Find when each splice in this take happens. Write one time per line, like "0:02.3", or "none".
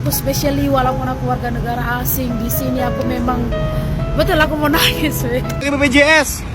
0:05.5